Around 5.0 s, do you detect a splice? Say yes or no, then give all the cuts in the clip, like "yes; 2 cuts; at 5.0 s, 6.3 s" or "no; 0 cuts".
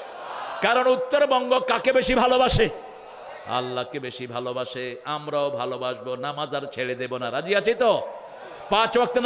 no; 0 cuts